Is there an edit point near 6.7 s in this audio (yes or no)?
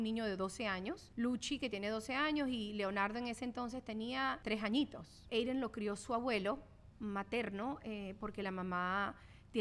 no